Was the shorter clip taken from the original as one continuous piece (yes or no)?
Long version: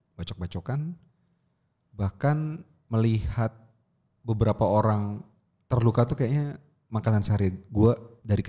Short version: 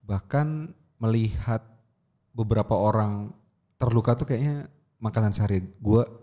yes